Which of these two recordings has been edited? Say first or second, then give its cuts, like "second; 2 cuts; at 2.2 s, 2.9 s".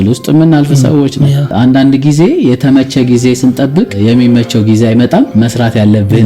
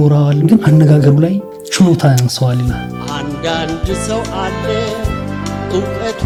first; 2 cuts; at 3.9 s, 5.3 s